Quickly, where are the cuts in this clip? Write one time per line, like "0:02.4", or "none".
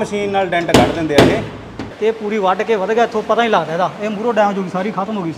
0:01.9